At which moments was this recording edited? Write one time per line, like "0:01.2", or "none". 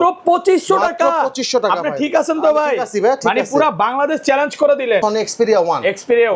0:05.0